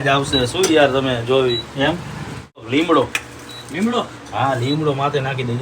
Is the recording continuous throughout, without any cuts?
no; 1 cut; at 2.7 s

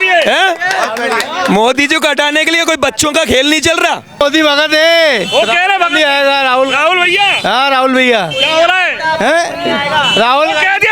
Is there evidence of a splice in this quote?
yes; 1 cut; at 4.2 s

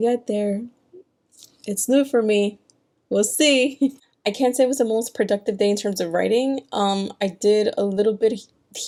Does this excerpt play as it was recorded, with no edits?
yes; 0 cuts

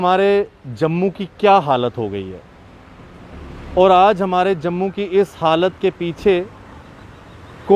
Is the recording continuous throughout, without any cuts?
yes; 0 cuts

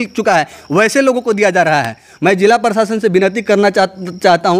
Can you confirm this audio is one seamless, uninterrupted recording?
yes; 0 cuts

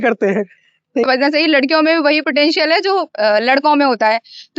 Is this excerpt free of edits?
no; 1 cut; at 1.1 s

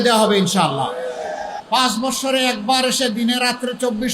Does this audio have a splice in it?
yes; 1 cut; at 1.6 s

